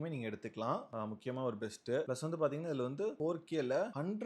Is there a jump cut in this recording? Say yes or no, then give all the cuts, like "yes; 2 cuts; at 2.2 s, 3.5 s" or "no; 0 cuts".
yes; 1 cut; at 3.2 s